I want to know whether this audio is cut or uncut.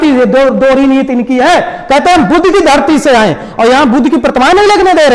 uncut